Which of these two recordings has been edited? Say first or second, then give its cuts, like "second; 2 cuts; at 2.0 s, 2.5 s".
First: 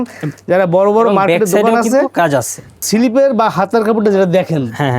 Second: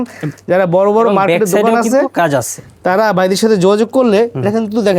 first; 1 cut; at 2.7 s